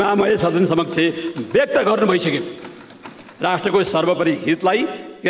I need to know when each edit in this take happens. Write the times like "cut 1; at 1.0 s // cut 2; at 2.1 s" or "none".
none